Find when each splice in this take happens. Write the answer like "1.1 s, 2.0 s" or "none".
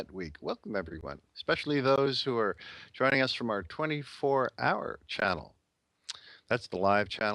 1.6 s